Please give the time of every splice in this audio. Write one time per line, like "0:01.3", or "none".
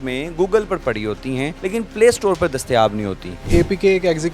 0:01.5
0:03.5